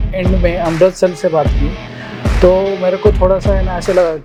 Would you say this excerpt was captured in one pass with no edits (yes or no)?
yes